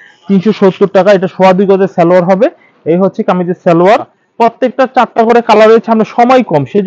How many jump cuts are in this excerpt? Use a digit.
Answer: 1